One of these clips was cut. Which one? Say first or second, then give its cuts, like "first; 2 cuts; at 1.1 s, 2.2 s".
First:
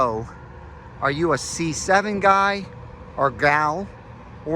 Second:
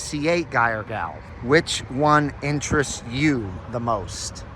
second; 1 cut; at 1.2 s